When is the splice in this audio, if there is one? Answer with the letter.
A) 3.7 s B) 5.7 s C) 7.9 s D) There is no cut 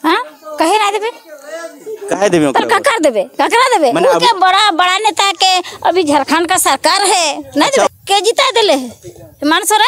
C